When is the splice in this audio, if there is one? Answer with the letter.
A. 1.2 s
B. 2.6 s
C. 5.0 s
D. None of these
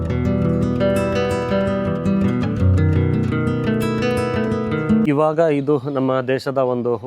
C